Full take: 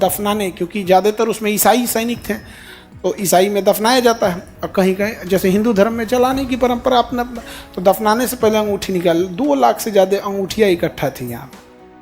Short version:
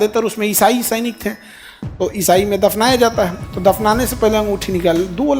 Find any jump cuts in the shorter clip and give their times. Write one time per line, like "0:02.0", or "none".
0:03.4

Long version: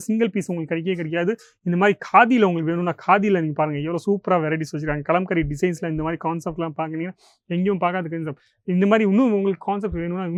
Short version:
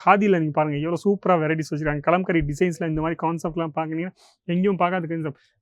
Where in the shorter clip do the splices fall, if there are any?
none

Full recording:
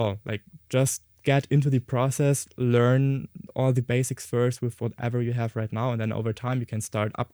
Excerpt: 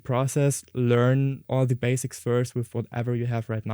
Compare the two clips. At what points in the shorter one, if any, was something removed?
0:01.4

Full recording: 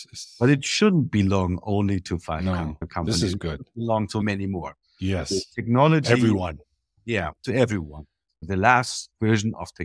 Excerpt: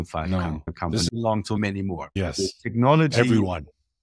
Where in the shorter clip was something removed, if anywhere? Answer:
0:01.1
0:02.1

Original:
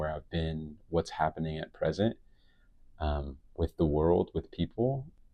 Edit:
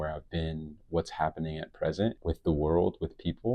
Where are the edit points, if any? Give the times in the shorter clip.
0:02.2

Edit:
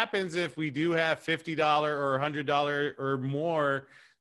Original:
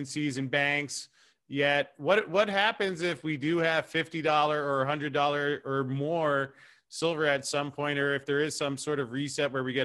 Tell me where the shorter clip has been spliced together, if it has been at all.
none

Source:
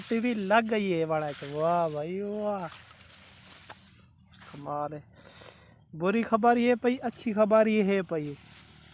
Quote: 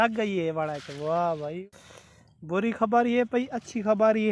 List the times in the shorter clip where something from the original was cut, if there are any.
0:01.6

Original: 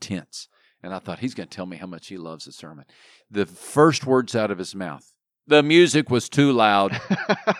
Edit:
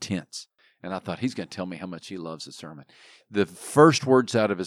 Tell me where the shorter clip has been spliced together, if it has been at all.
none

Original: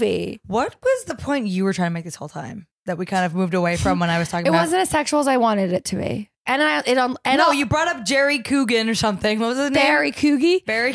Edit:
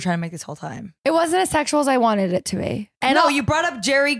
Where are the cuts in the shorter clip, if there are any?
0:01.0
0:02.9

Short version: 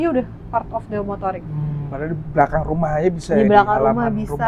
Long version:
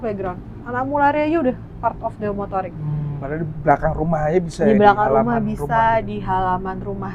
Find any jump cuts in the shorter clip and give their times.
none

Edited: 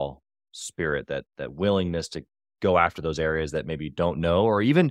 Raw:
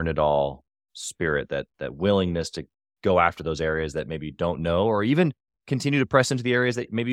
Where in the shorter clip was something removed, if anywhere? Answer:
none

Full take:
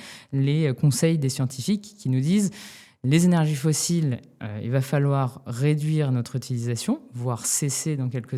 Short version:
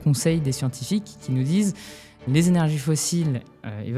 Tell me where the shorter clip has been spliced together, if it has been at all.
none

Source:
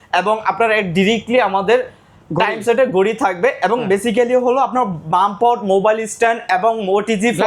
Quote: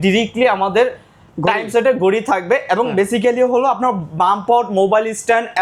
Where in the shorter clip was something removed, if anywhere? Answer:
none

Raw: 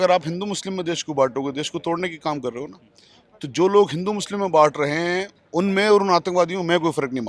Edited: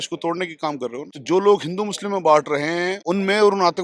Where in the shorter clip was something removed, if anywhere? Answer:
0:01.1
0:03.0

